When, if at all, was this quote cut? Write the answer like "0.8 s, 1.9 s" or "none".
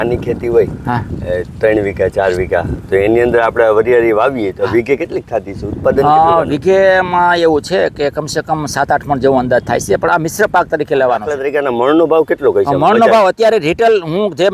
11.4 s